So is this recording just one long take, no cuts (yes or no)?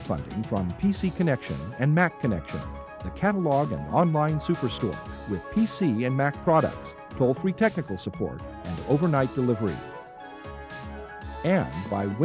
yes